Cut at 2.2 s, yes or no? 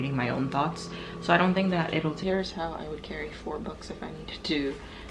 yes